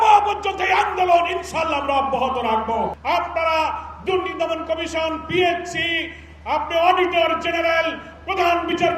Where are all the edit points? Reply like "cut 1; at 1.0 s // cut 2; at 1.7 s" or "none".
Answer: cut 1; at 3.0 s